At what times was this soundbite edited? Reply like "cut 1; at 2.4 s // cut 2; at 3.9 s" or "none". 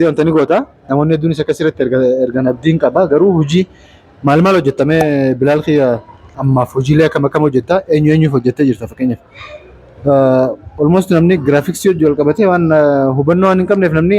cut 1; at 6.4 s